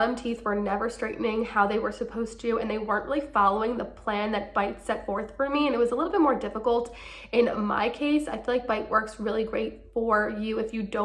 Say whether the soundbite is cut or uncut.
uncut